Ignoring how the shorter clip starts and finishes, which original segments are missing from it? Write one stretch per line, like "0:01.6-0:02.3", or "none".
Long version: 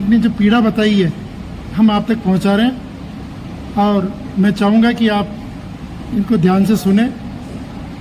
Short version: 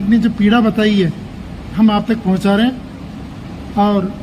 none